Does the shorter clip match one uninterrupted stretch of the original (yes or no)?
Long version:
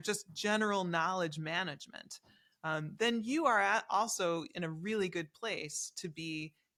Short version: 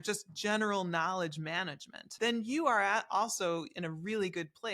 no